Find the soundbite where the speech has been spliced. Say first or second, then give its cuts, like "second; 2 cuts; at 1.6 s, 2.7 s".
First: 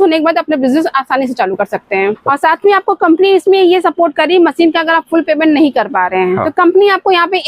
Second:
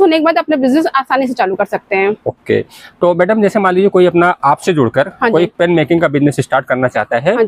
first; 2 cuts; at 2.2 s, 6.5 s